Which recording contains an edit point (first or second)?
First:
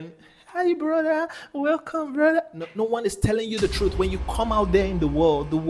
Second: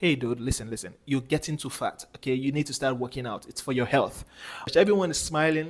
second